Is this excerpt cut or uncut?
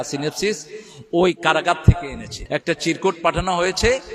cut